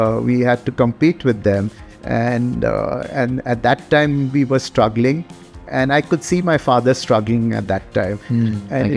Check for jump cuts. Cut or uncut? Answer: uncut